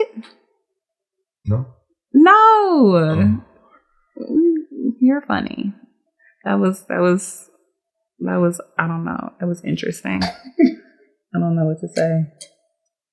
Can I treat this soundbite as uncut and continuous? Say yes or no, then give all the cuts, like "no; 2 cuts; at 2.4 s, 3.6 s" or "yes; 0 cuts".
yes; 0 cuts